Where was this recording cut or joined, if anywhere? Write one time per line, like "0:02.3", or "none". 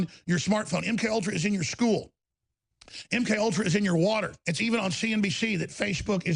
0:04.4